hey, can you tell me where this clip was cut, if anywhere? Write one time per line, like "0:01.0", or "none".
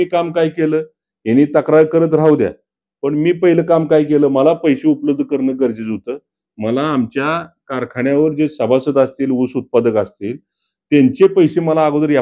none